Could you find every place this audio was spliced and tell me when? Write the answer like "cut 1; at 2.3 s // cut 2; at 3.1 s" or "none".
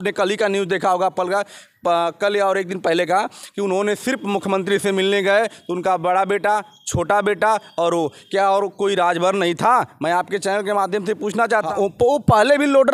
cut 1; at 11.7 s